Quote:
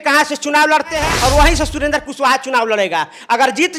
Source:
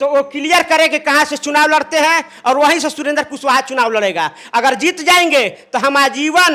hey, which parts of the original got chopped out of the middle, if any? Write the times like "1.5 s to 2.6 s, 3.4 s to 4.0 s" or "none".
2.1 s to 2.3 s

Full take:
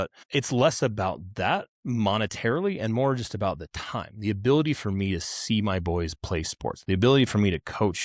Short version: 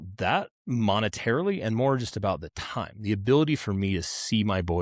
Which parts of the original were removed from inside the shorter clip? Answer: none

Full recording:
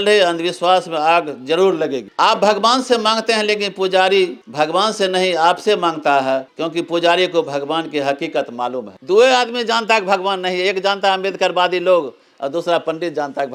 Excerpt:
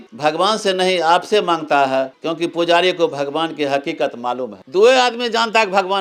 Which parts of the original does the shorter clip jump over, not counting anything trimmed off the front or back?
none

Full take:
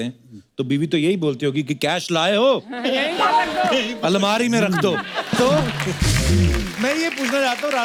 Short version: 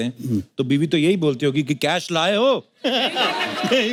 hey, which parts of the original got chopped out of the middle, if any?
none

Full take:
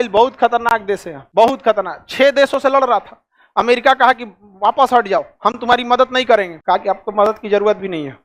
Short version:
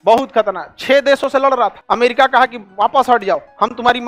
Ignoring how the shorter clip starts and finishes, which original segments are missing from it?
3.1 s to 3.4 s, 4.3 s to 4.5 s

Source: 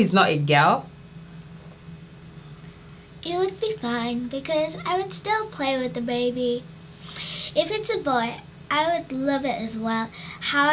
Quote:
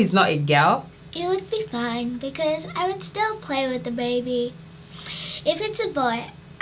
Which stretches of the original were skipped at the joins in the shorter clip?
1.0 s to 3.1 s

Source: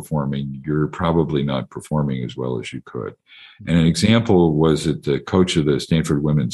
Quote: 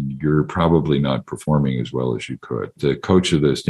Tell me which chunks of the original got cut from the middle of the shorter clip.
3.2 s to 5.0 s

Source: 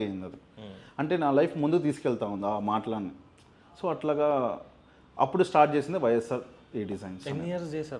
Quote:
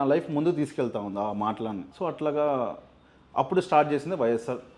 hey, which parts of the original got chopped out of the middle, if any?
3.1 s to 3.7 s

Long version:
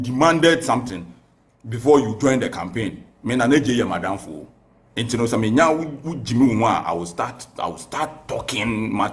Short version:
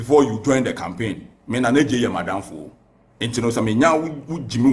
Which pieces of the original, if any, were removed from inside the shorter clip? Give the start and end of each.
none

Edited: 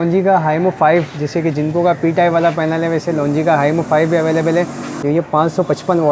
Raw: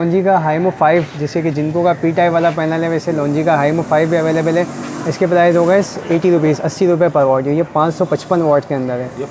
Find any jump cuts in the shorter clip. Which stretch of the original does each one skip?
5.0 s to 7.4 s

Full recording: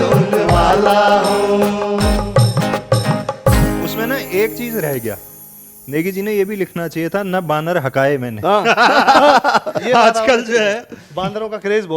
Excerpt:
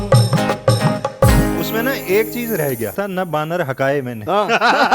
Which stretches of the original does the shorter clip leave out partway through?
5.2 s to 7.1 s

